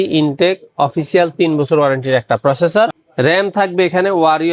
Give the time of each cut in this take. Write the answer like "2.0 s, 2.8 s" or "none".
3.0 s